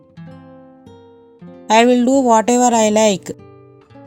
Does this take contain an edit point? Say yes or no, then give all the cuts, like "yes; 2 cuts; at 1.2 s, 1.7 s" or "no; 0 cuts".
no; 0 cuts